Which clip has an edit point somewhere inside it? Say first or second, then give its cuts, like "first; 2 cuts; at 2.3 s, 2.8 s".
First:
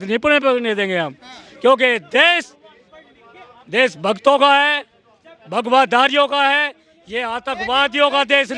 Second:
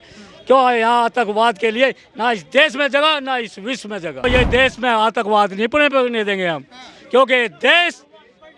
second; 1 cut; at 4.2 s